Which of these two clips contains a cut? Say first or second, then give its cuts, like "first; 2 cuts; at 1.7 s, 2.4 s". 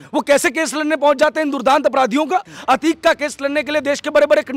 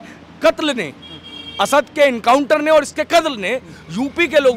first; 1 cut; at 2.5 s